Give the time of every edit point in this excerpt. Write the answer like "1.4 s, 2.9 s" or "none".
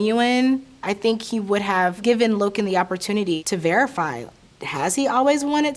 2.0 s